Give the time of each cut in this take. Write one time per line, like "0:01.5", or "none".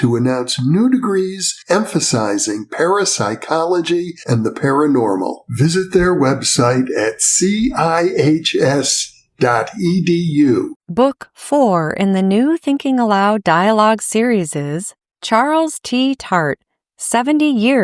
0:10.8